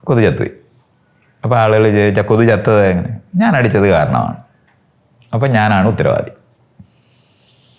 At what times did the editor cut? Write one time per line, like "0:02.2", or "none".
none